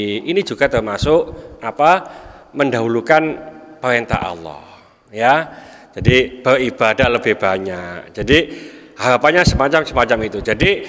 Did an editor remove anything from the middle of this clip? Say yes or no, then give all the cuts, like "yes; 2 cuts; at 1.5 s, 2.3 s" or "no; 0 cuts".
no; 0 cuts